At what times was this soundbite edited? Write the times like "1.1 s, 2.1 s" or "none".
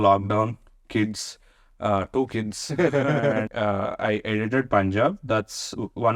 3.5 s